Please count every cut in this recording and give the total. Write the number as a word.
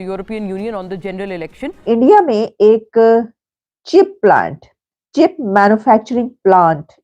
one